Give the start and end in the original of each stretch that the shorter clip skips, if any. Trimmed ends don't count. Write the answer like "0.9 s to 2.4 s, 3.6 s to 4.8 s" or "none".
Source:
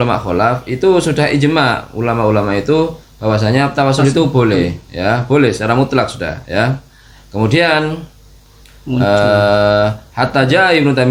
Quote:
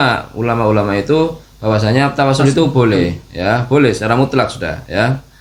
none